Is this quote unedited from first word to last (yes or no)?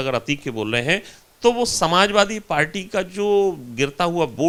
yes